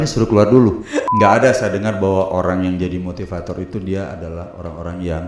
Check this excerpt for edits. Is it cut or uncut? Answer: cut